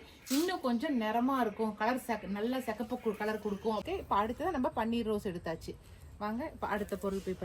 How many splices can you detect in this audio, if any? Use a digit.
1